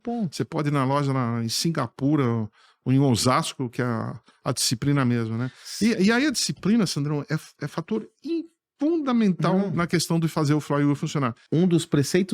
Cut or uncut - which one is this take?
cut